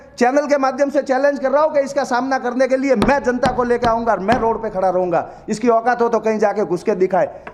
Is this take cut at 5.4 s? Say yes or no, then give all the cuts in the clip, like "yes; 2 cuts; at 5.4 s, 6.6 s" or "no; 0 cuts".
no; 0 cuts